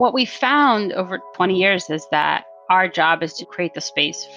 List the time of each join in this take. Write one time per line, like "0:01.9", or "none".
0:01.3
0:02.5